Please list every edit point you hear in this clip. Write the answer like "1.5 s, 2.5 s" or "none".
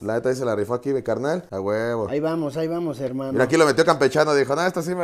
1.5 s